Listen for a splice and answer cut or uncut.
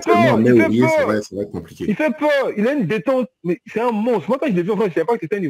uncut